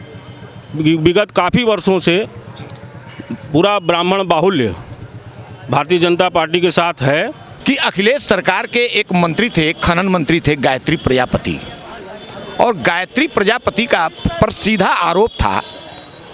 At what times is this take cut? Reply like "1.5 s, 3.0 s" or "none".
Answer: 7.5 s